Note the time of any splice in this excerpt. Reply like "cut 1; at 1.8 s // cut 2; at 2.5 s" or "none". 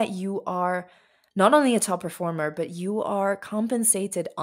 none